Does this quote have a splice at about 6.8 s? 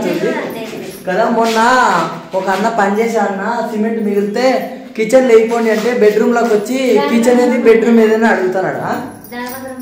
no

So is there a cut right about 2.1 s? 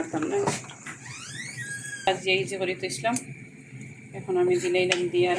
yes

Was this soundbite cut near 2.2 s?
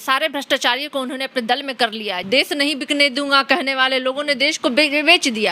yes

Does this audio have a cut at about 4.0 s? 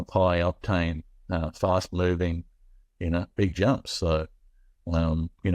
no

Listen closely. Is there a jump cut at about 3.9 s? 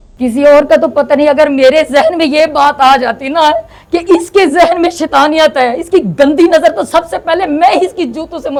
no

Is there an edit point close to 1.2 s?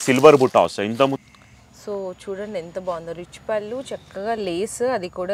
yes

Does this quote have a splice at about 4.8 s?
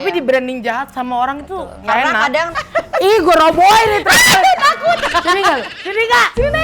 no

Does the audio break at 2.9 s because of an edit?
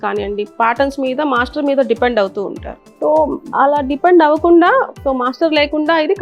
no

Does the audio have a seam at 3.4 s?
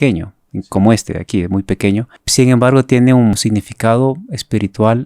yes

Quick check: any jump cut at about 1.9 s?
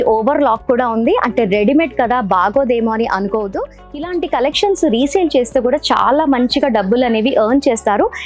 no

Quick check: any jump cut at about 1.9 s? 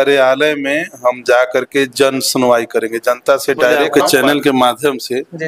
no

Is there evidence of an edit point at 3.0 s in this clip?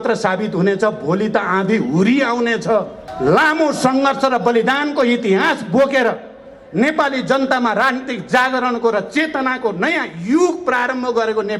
yes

